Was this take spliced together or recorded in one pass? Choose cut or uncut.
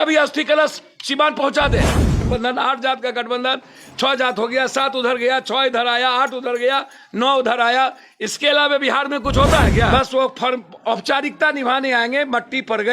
cut